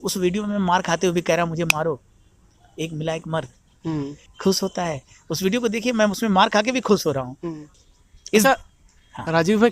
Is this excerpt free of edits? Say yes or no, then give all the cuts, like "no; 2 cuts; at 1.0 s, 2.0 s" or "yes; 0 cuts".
no; 2 cuts; at 4.2 s, 7.7 s